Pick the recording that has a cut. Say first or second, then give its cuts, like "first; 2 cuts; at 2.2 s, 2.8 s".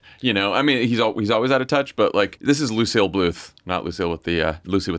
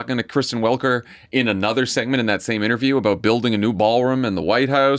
first; 1 cut; at 2.4 s